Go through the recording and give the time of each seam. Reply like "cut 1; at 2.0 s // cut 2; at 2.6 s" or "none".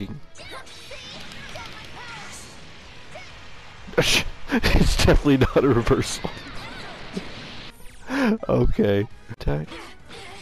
cut 1; at 9.4 s